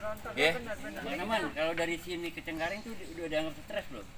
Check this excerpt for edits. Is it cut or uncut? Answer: cut